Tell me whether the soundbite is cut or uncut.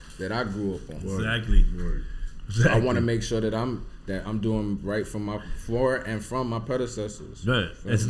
uncut